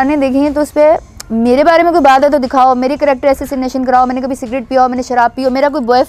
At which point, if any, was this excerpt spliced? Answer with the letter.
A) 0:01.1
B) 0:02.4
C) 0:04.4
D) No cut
D